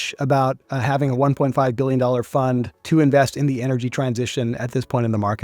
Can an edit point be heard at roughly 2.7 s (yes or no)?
yes